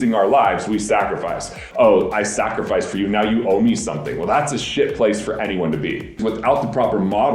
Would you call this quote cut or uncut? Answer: cut